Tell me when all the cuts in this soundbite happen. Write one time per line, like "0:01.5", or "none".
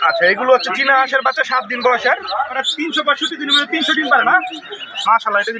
0:02.7